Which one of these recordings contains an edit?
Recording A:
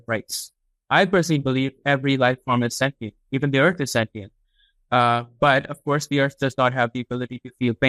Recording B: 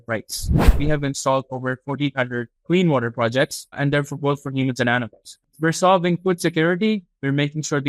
B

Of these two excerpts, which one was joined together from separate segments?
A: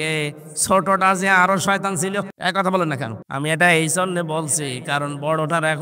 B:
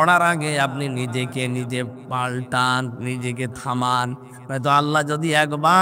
A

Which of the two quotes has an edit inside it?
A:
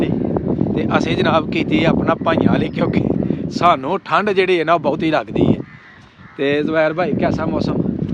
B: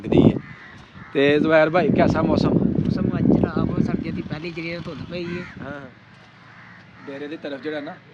B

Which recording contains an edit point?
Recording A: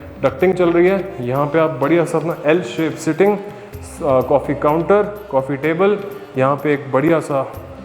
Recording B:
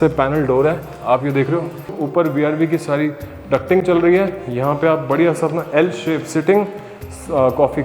B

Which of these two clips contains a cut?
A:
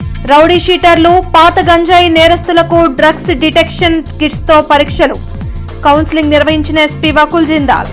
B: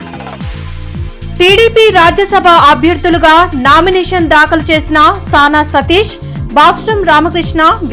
B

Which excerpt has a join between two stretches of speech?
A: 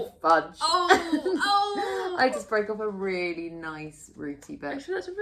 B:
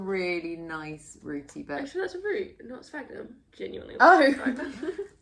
B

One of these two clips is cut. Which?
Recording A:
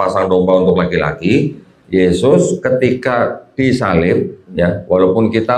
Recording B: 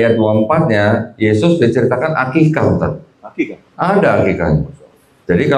A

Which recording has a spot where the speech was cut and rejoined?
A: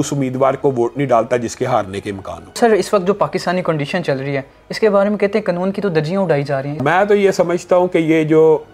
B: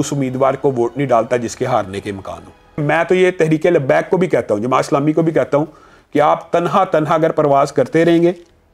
A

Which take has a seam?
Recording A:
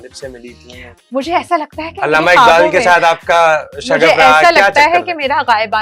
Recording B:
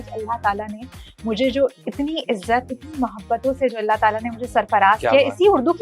B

